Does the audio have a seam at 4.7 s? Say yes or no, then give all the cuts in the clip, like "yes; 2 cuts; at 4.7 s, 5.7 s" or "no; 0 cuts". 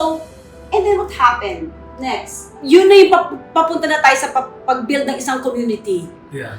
no; 1 cut; at 2.7 s